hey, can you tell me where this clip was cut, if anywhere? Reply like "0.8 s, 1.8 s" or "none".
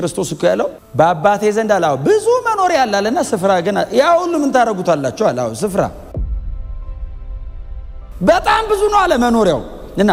none